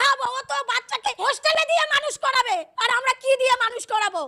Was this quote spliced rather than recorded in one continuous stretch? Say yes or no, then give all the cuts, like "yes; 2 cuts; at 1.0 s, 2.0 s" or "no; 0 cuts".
yes; 2 cuts; at 1.2 s, 2.7 s